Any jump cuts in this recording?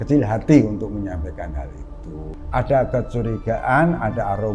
yes; 1 cut; at 2.2 s

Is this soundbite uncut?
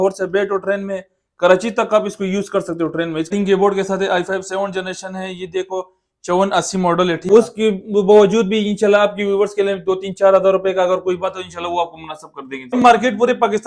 no; 3 cuts; at 3.3 s, 7.3 s, 12.7 s

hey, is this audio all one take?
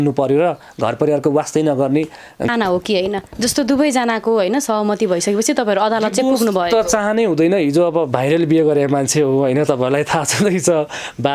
no; 1 cut; at 2.5 s

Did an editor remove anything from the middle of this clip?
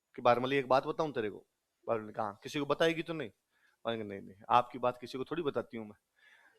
no; 0 cuts

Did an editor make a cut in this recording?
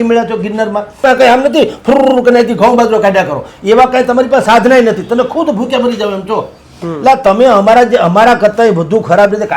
yes; 1 cut; at 1.0 s

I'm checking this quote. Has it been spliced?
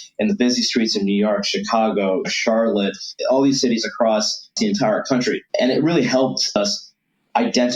yes; 4 cuts; at 3.1 s, 4.5 s, 5.5 s, 6.6 s

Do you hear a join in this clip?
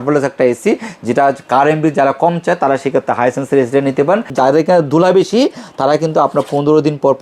yes; 1 cut; at 4.3 s

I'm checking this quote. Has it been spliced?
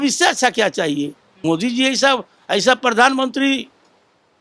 yes; 1 cut; at 1.3 s

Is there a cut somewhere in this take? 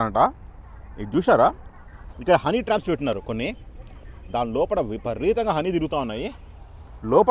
no; 0 cuts

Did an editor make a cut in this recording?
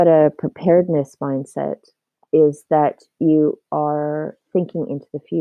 no; 0 cuts

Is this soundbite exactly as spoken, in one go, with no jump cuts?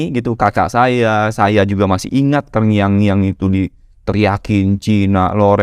yes; 0 cuts

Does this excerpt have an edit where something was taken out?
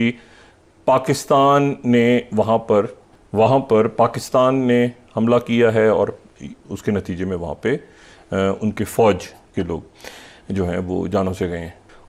no; 0 cuts

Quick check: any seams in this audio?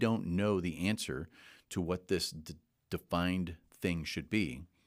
no; 0 cuts

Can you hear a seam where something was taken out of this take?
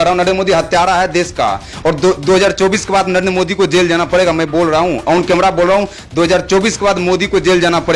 no; 0 cuts

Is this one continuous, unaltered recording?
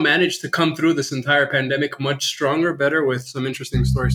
yes; 0 cuts

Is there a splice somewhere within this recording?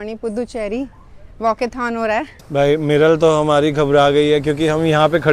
yes; 1 cut; at 2.4 s

